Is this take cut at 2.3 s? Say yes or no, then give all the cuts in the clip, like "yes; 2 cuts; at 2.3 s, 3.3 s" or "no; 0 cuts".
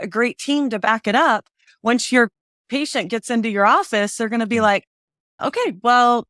no; 0 cuts